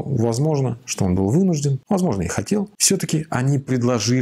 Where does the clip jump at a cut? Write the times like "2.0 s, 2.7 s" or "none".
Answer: 1.8 s, 2.8 s